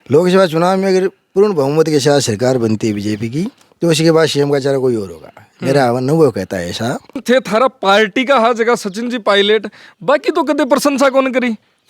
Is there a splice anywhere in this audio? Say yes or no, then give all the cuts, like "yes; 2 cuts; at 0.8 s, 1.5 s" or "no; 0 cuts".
yes; 1 cut; at 7.2 s